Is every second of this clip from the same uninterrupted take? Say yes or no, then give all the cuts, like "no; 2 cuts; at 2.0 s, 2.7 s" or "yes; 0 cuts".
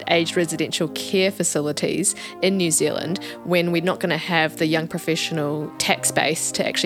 yes; 0 cuts